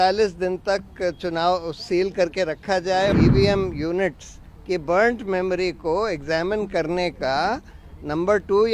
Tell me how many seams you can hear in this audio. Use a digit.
1